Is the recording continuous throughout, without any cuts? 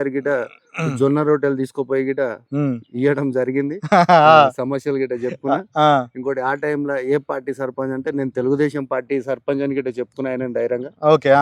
yes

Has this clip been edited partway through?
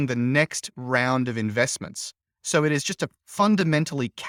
no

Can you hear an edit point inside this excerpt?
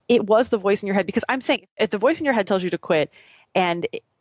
yes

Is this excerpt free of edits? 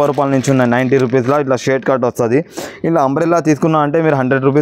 yes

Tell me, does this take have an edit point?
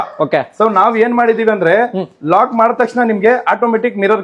no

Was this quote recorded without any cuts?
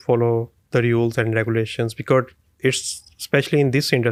yes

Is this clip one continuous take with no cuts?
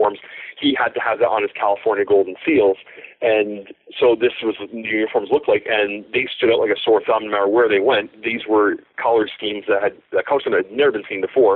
yes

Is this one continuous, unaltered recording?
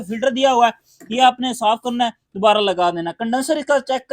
yes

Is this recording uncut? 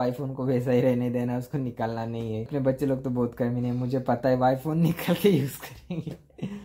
no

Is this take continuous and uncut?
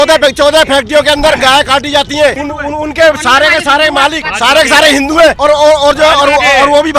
no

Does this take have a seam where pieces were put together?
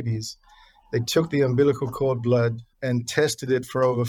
yes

